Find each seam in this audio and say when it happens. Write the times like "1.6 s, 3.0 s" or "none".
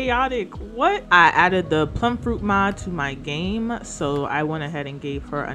1.0 s